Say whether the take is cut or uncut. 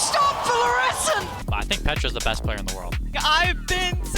cut